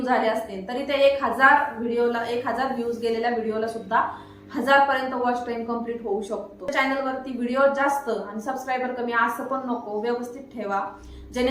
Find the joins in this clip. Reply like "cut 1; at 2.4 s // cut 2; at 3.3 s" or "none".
cut 1; at 6.7 s